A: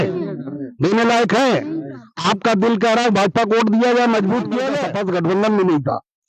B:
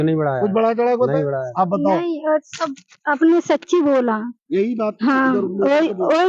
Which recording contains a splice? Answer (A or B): A